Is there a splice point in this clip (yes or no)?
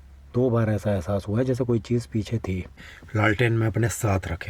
yes